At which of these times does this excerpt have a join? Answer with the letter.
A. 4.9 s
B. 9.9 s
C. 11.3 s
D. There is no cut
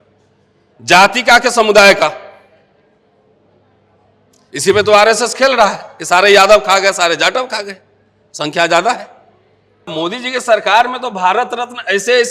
B